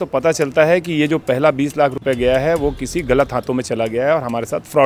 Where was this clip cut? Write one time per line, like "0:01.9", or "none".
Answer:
none

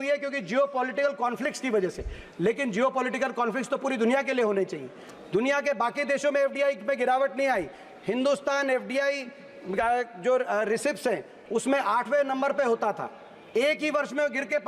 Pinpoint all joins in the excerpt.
none

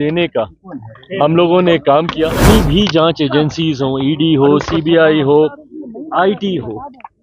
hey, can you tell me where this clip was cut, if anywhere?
0:02.5

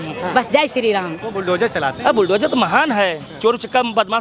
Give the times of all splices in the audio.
0:01.2

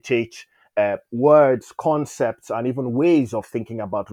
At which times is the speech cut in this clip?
none

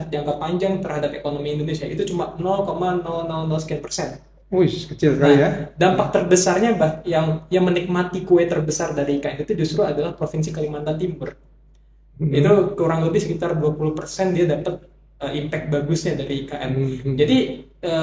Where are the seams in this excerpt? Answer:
none

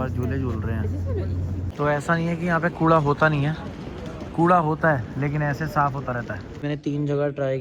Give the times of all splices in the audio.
0:01.7
0:06.5

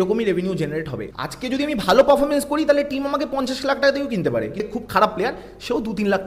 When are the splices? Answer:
0:01.0
0:04.6

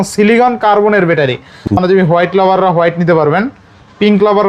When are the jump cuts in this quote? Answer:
0:01.7

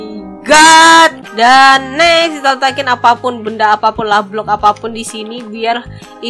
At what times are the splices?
0:01.2

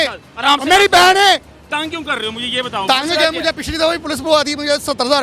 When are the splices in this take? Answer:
0:01.6

